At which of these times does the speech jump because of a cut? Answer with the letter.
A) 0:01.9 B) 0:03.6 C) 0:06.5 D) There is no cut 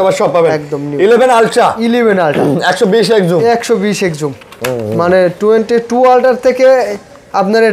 D